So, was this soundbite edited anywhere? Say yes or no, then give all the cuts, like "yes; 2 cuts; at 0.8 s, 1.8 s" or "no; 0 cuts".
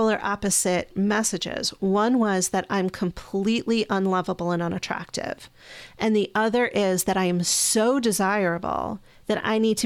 no; 0 cuts